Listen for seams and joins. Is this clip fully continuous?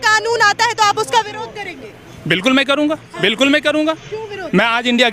yes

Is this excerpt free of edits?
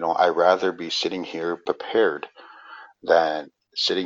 no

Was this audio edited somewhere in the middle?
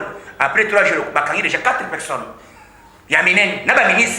no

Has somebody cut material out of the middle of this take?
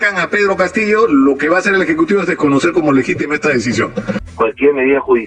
yes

